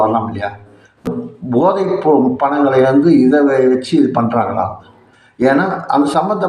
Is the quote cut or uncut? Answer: cut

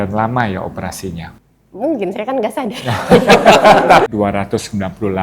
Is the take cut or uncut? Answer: cut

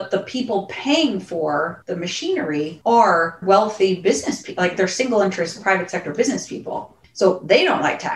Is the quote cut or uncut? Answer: cut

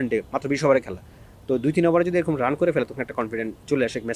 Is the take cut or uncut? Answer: uncut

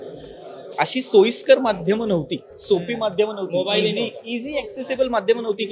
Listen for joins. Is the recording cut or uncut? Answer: uncut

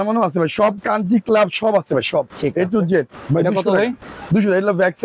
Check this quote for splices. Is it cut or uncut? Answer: uncut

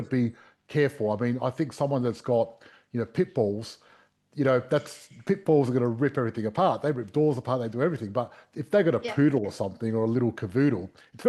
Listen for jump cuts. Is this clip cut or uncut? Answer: uncut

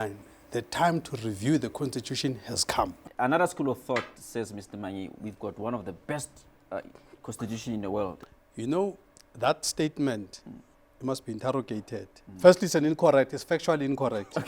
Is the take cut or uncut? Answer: cut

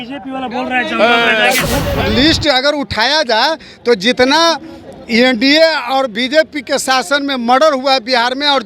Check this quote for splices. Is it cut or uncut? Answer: cut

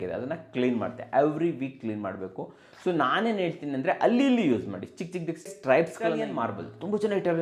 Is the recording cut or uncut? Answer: cut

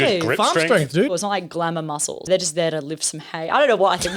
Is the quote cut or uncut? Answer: cut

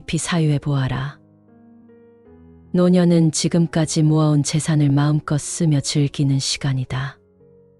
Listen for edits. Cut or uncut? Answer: cut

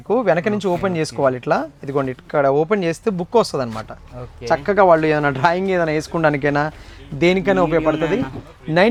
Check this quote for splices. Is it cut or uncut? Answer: uncut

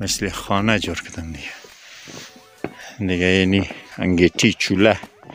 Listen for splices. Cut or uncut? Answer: uncut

